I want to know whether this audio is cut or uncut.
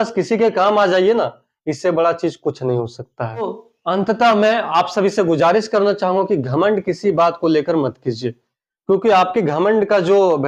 uncut